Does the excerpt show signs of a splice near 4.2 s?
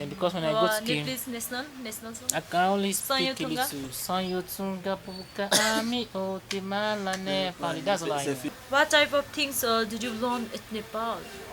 no; 1 cut; at 8.5 s

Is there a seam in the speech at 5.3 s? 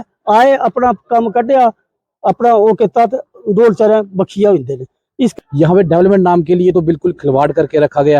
yes; 1 cut; at 5.3 s

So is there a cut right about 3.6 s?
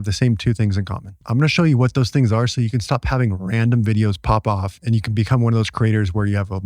no; 1 cut; at 1.1 s

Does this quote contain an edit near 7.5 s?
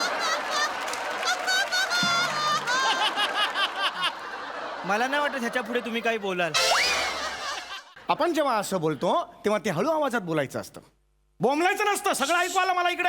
yes; 1 cut; at 7.5 s

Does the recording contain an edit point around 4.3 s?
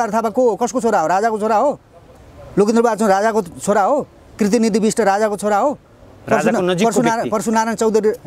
no; 0 cuts

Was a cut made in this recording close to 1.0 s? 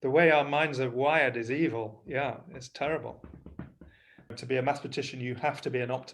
no; 1 cut; at 4.4 s

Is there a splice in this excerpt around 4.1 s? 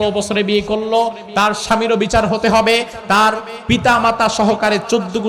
no; 0 cuts

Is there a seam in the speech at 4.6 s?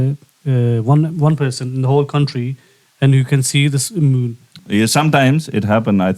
yes; 1 cut; at 4.6 s

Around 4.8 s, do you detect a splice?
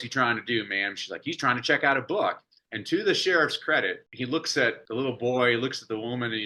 yes; 2 cuts; at 4.0 s, 4.8 s

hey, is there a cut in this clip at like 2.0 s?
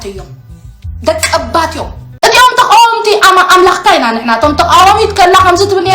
yes; 1 cut; at 2.0 s

